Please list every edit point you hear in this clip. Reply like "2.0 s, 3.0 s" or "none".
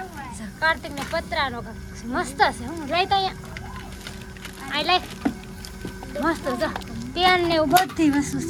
none